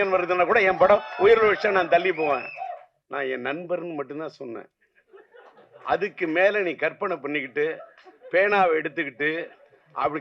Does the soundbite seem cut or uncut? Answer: cut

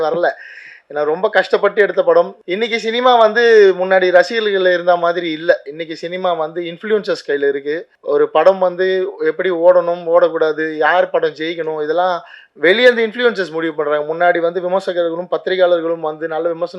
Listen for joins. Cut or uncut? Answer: cut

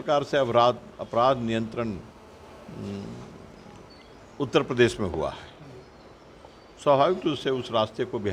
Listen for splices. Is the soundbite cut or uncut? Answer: uncut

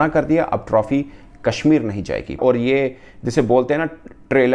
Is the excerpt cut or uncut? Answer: cut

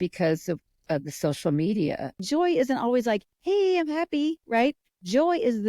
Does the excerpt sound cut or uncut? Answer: cut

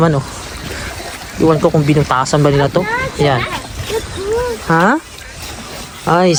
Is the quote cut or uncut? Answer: uncut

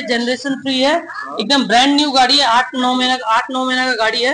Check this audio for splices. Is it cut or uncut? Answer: uncut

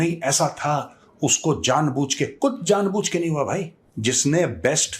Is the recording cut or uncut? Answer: cut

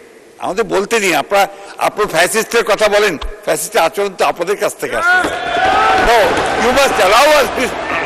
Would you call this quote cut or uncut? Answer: uncut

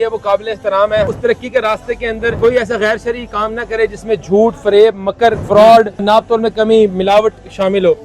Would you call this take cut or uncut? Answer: cut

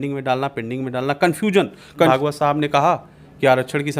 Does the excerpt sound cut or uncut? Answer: cut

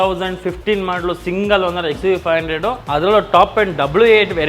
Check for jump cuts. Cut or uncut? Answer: cut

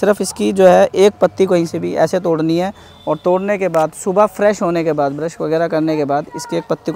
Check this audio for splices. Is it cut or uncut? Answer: uncut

